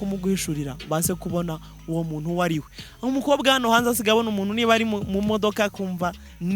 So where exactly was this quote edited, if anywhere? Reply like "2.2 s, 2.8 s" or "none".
none